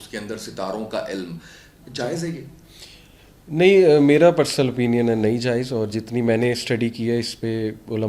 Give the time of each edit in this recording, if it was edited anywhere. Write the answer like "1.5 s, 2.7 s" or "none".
none